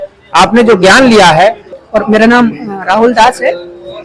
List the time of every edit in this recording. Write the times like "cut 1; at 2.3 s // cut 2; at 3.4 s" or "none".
cut 1; at 1.7 s

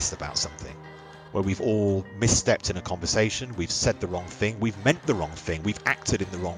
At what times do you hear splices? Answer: none

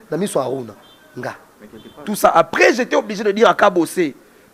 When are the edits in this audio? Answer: cut 1; at 2.0 s

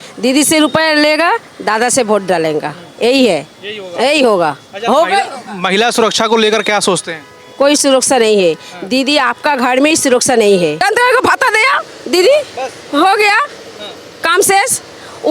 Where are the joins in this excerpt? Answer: cut 1; at 10.8 s

